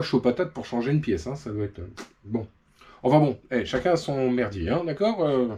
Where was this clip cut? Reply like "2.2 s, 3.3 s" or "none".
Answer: none